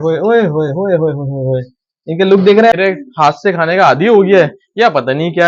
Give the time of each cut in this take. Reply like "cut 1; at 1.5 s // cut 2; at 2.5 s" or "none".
cut 1; at 2.7 s